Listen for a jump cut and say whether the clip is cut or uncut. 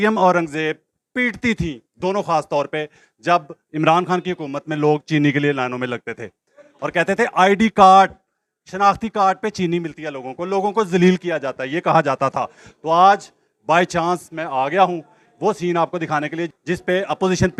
uncut